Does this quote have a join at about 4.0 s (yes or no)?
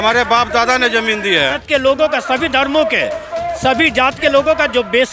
no